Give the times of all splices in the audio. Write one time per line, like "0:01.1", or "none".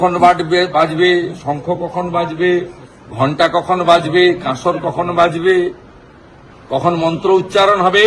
none